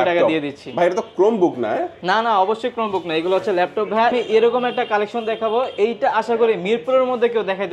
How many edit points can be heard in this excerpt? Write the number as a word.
one